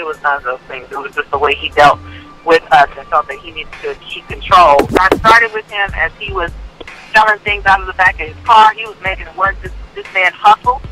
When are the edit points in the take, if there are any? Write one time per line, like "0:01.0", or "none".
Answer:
0:04.9